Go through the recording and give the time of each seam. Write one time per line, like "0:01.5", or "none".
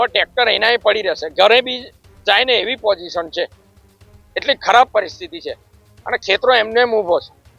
none